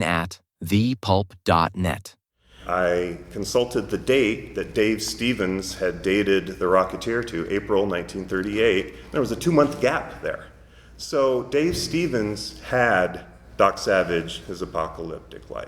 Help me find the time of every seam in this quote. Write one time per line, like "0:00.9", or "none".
0:02.6